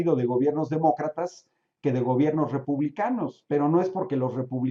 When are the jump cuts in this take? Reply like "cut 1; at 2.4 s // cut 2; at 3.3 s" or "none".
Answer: none